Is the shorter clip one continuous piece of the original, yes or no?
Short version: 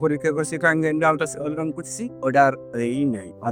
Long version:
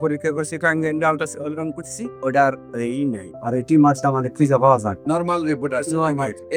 yes